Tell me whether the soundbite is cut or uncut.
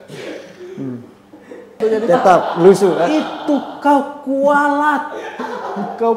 cut